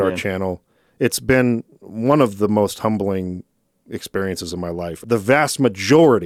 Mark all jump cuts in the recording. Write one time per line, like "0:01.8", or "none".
0:05.0